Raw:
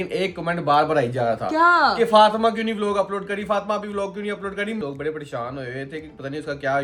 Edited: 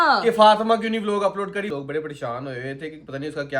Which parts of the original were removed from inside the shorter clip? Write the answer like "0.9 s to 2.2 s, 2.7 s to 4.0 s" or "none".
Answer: 3.5 s to 4.8 s